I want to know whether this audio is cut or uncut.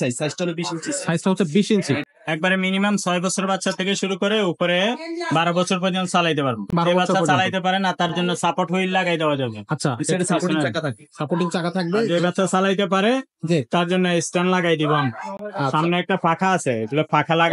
cut